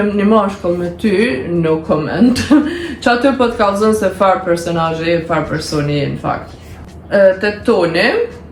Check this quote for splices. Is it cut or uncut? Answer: uncut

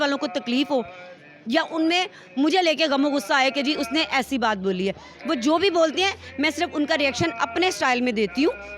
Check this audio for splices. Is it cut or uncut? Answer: uncut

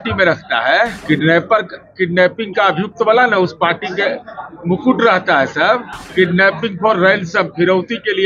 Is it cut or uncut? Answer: cut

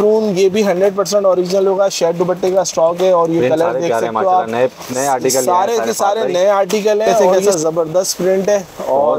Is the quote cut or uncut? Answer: cut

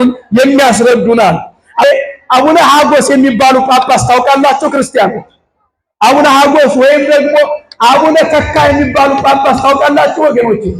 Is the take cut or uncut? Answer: cut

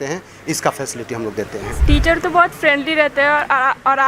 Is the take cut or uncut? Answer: cut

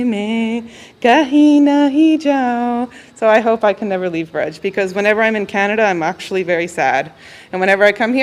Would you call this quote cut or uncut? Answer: uncut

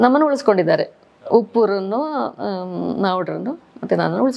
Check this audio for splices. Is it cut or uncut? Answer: uncut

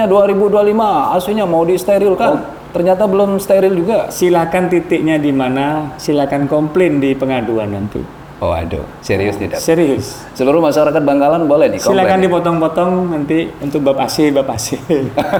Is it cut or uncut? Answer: uncut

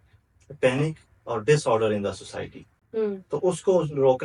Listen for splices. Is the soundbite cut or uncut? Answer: uncut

